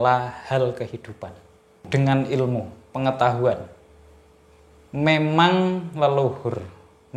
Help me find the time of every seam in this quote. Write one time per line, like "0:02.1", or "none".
0:01.8